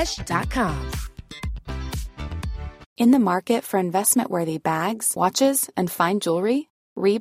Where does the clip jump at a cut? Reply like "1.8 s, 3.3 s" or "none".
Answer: 2.8 s